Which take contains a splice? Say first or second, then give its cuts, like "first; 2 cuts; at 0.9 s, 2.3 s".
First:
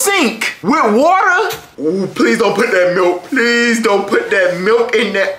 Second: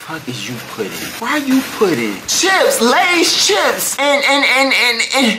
first; 1 cut; at 1.6 s